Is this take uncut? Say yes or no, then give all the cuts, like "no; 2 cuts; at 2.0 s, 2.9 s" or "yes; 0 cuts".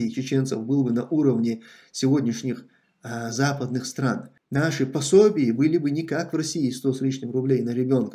no; 1 cut; at 4.3 s